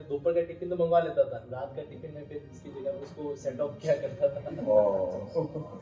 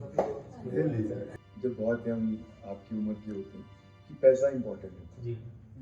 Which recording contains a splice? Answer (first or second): second